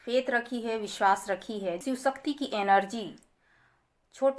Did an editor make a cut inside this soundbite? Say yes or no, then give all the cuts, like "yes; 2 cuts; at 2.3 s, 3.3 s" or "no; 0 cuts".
yes; 1 cut; at 1.8 s